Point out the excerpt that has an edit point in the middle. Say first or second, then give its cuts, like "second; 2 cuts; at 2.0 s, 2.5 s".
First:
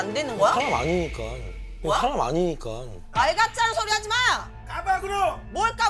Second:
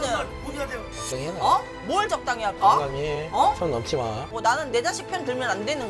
second; 1 cut; at 4.2 s